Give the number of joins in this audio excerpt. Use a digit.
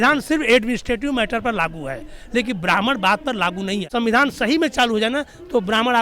1